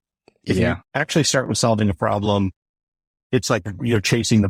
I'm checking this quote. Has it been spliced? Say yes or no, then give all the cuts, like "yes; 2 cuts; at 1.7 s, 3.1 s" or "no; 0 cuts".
no; 0 cuts